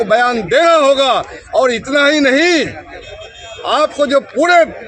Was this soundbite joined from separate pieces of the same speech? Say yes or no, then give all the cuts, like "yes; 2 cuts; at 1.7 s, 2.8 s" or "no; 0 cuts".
no; 0 cuts